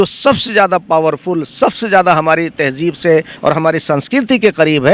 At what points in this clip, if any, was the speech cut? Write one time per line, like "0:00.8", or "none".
none